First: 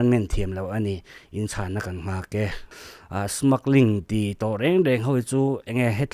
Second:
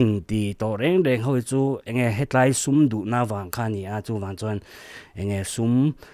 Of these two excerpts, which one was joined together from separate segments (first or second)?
first